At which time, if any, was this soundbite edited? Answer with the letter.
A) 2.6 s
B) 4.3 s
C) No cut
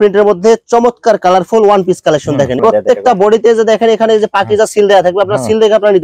A